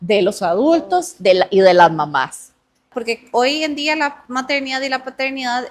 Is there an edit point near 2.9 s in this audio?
yes; 1 cut; at 2.9 s

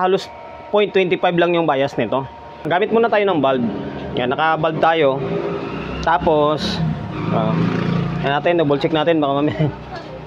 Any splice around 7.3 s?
no; 1 cut; at 2.6 s

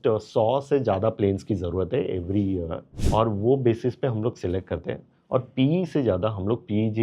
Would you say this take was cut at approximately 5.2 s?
no; 1 cut; at 2.9 s

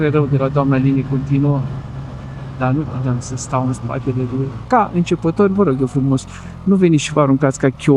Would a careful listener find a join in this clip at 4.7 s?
yes; 1 cut; at 4.7 s

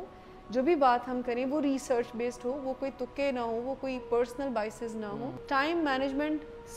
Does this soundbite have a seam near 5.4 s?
yes; 1 cut; at 5.4 s

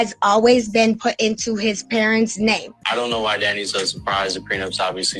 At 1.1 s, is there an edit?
no; 1 cut; at 2.7 s

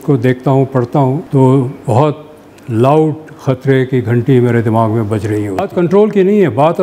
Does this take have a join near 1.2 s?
yes; 2 cuts; at 1.2 s, 5.6 s

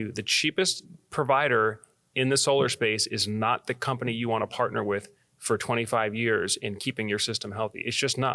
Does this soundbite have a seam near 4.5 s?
no; 0 cuts

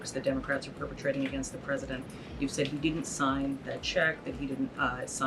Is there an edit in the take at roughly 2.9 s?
no; 0 cuts

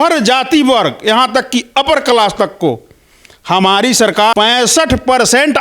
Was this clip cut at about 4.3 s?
yes; 1 cut; at 4.3 s

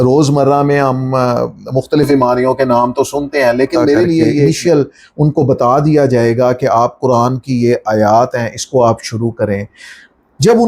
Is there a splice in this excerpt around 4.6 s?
yes; 1 cut; at 4.6 s

